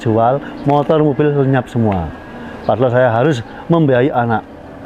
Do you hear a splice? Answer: no; 0 cuts

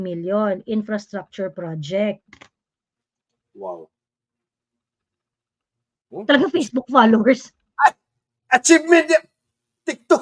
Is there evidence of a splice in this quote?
no; 0 cuts

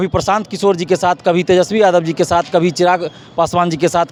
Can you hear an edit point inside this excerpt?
no; 0 cuts

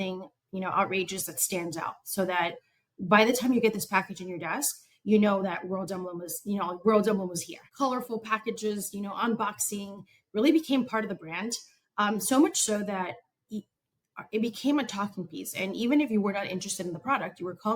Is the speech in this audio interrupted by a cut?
yes; 1 cut; at 7.6 s

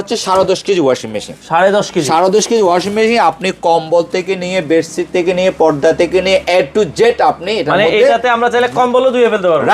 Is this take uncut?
yes; 0 cuts

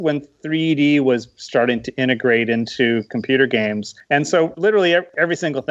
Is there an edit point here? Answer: no; 0 cuts

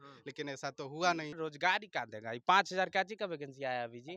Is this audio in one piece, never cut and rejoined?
no; 1 cut; at 1.4 s

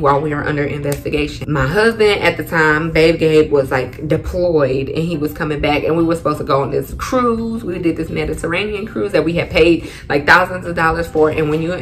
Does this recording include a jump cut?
yes; 1 cut; at 1.4 s

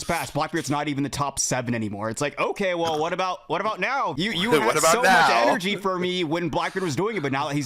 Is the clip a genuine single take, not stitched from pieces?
no; 1 cut; at 4.1 s

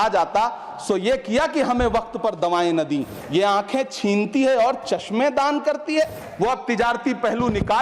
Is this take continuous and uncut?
no; 2 cuts; at 3.2 s, 6.2 s

